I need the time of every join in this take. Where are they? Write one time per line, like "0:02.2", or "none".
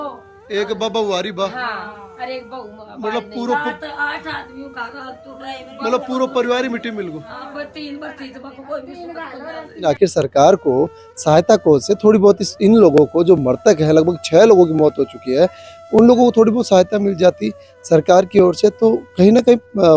0:09.9